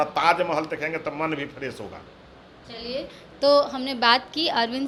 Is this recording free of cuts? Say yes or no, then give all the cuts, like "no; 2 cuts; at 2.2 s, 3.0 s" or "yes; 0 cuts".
yes; 0 cuts